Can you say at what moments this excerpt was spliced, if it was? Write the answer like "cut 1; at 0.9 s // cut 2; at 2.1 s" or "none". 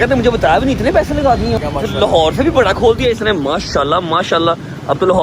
cut 1; at 1.6 s